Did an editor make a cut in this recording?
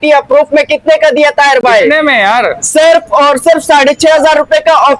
no; 0 cuts

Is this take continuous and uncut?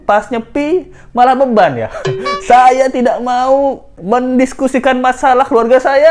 yes; 0 cuts

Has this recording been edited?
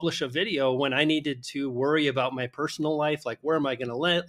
no; 0 cuts

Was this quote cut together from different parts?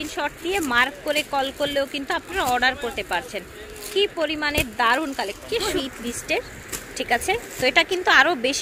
yes; 1 cut; at 5.7 s

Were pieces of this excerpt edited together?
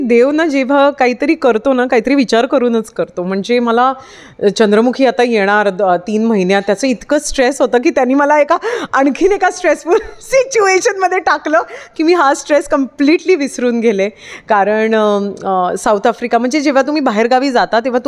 no; 0 cuts

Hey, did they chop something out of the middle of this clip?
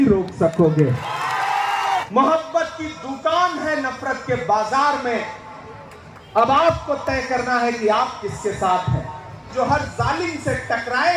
yes; 2 cuts; at 2.1 s, 9.4 s

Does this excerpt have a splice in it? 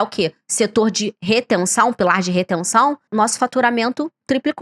yes; 1 cut; at 3.1 s

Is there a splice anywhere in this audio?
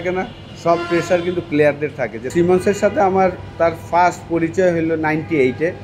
yes; 1 cut; at 2.2 s

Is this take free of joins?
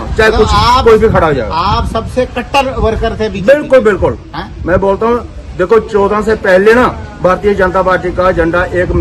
yes; 0 cuts

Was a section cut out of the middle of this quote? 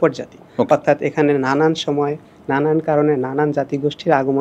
no; 0 cuts

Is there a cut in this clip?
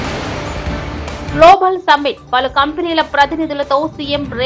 yes; 1 cut; at 1.2 s

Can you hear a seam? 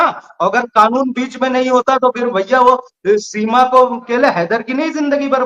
yes; 1 cut; at 4.1 s

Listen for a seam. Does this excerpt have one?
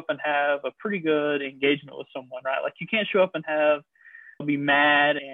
no; 0 cuts

